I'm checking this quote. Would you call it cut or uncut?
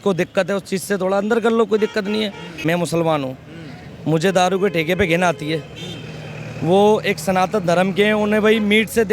cut